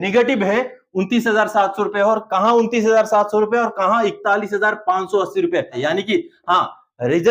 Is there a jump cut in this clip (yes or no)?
yes